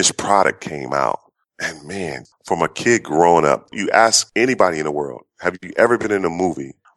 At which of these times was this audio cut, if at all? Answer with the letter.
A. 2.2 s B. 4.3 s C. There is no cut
A